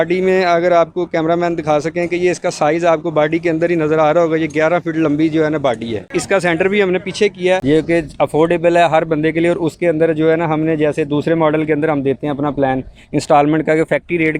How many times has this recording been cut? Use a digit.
1